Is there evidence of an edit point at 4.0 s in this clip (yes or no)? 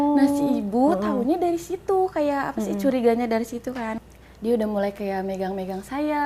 yes